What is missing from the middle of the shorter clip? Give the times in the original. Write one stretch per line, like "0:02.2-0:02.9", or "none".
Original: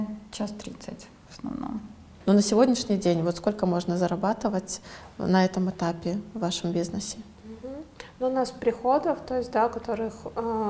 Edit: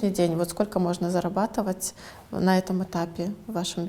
none